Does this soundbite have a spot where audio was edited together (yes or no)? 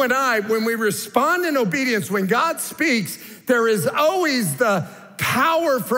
no